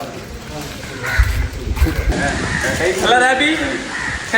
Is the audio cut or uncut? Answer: cut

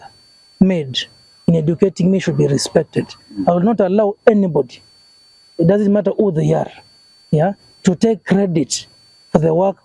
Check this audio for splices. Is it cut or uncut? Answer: uncut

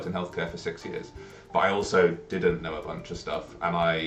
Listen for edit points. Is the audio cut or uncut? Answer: uncut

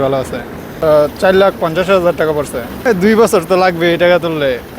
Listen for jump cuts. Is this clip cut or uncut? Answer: cut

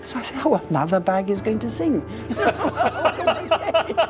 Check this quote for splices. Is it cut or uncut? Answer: uncut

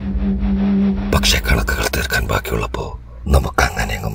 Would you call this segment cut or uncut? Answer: cut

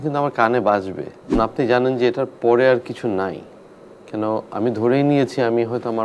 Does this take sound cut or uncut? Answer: cut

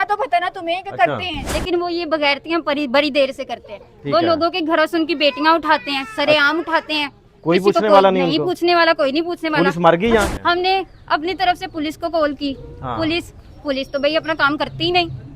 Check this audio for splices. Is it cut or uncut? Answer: cut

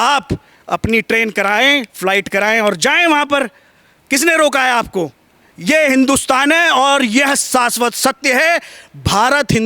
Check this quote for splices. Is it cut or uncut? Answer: uncut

